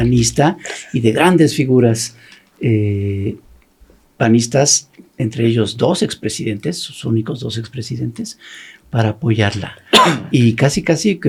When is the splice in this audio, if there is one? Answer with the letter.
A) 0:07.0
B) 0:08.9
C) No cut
C